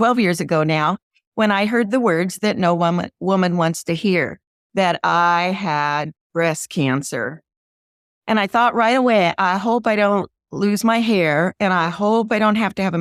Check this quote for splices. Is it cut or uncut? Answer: uncut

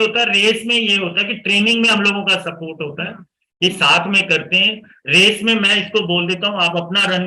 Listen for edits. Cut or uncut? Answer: uncut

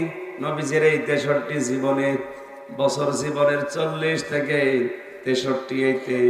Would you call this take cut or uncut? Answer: uncut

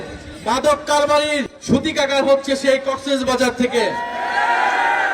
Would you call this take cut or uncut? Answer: cut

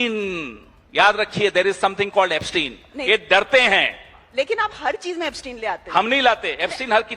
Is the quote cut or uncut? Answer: uncut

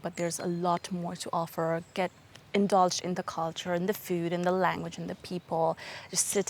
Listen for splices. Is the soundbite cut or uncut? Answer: uncut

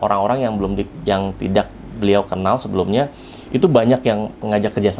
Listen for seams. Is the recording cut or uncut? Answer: uncut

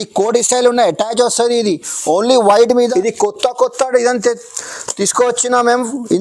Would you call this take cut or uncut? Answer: cut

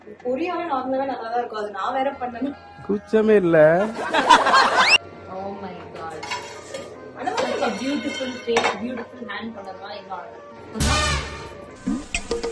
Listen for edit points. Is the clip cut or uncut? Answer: uncut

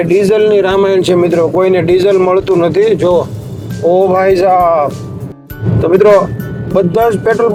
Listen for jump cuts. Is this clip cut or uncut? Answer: uncut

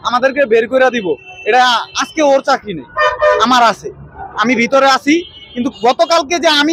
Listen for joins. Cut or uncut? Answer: uncut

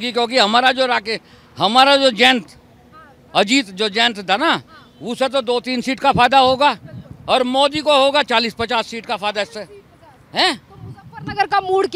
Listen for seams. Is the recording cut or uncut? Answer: uncut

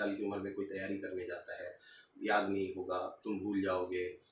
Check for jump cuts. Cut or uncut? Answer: uncut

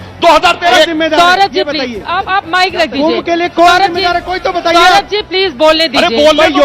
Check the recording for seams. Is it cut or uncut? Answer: cut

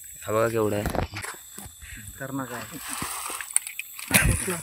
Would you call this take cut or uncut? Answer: uncut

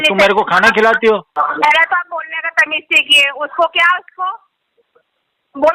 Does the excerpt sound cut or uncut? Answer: cut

